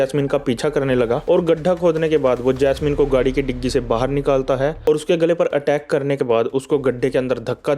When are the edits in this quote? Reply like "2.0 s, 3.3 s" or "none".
1.2 s, 4.8 s